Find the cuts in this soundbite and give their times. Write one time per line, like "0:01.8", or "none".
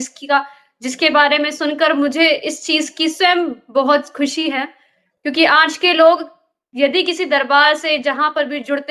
none